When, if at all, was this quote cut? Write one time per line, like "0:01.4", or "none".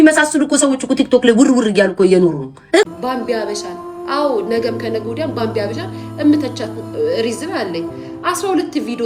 0:02.8